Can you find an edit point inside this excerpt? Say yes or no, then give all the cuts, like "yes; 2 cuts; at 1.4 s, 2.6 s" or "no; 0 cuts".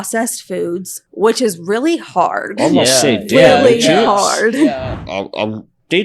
yes; 1 cut; at 4.9 s